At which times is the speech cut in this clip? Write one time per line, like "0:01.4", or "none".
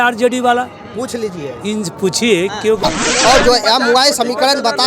0:02.9